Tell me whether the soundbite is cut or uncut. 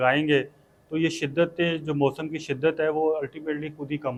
uncut